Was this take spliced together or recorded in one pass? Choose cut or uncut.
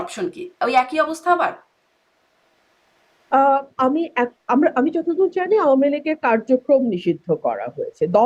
uncut